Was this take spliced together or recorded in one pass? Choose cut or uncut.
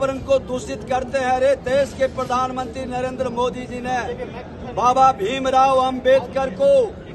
uncut